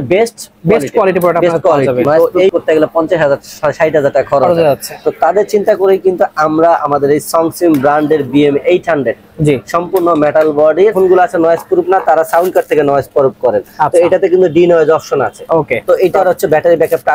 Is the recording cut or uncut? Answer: cut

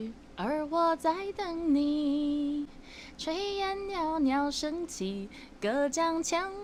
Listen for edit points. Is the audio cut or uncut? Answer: uncut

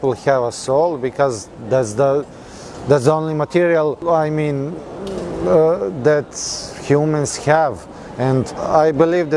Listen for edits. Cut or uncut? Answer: uncut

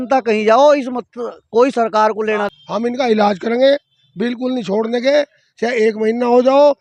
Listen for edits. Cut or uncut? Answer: cut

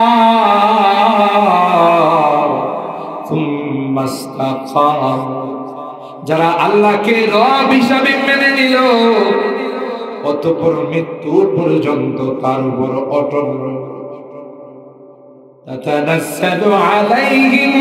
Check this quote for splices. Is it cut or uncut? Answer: uncut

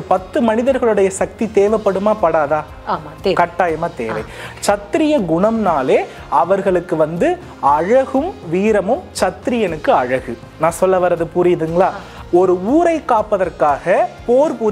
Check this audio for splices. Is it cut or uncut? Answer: cut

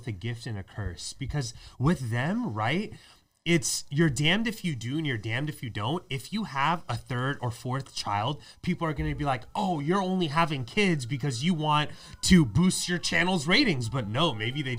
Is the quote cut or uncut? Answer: uncut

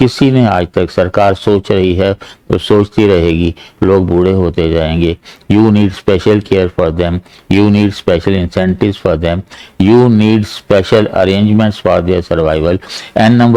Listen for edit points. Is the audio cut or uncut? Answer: uncut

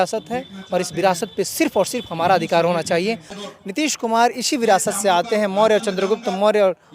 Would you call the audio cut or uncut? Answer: cut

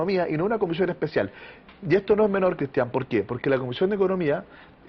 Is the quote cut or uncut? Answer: cut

